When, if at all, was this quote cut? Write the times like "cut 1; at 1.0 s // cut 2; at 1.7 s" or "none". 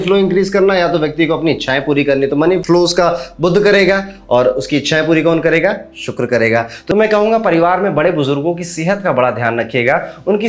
cut 1; at 6.8 s